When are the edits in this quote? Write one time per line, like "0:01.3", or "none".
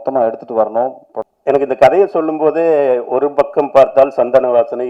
0:01.1